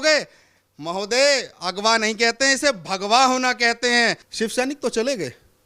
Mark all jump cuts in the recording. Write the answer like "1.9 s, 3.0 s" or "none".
4.2 s